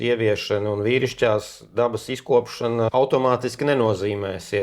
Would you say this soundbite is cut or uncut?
cut